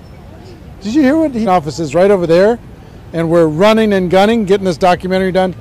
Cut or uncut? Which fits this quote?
uncut